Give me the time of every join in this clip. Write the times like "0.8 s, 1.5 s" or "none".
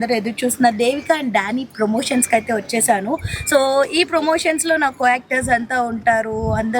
none